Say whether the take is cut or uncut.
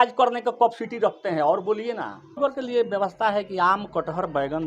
cut